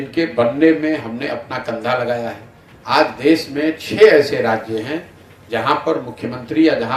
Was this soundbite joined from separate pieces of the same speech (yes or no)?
no